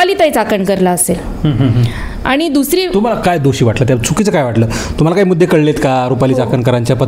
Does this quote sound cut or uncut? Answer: uncut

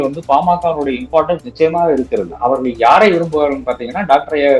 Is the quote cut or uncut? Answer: cut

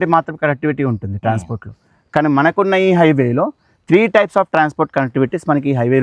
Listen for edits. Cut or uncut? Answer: uncut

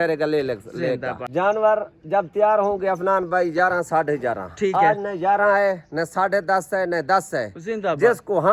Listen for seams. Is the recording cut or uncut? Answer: cut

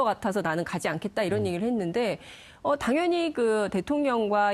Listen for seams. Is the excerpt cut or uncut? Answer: cut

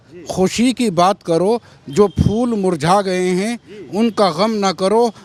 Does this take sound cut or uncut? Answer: uncut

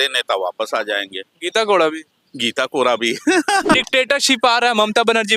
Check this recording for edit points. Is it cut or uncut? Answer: cut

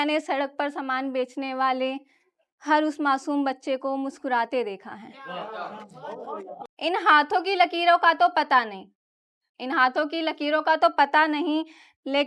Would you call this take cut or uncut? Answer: cut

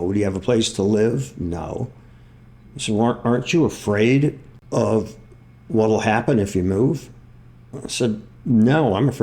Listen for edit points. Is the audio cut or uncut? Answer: cut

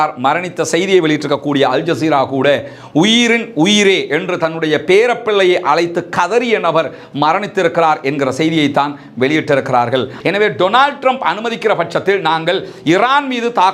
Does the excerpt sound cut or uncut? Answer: cut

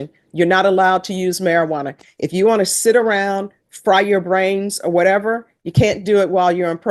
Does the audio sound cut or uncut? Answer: uncut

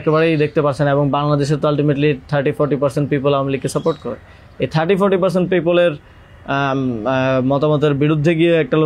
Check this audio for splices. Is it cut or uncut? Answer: uncut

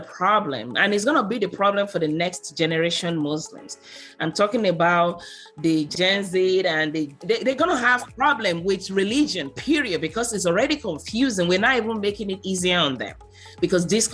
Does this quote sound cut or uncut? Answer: cut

